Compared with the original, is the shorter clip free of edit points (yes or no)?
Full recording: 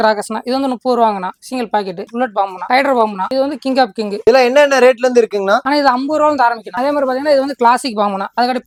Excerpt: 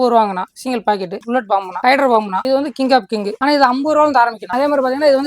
no